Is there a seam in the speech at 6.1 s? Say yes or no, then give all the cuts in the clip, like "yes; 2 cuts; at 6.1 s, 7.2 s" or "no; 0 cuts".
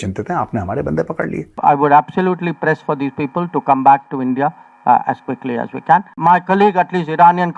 yes; 2 cuts; at 1.5 s, 6.1 s